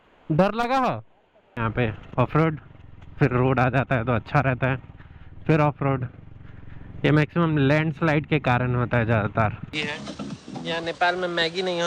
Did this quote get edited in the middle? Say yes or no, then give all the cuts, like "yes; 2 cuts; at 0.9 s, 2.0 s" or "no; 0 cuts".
yes; 2 cuts; at 1.6 s, 9.8 s